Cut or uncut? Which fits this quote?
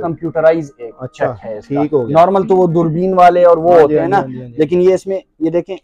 uncut